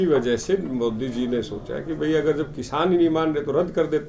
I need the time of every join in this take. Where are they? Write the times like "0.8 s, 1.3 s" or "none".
none